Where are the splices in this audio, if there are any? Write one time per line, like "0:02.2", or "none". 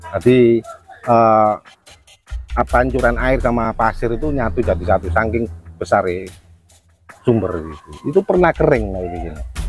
none